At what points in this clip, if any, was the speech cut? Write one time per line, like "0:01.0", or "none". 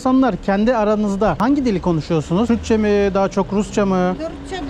0:01.4
0:02.5